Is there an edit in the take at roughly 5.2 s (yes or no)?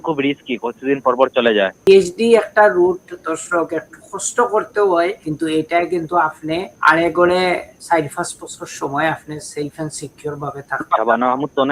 yes